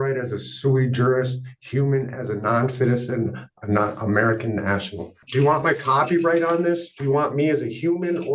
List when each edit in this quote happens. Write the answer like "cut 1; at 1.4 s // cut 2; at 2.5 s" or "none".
cut 1; at 5.2 s